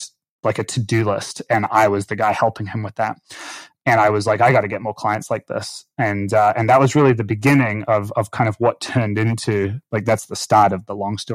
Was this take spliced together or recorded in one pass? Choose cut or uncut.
uncut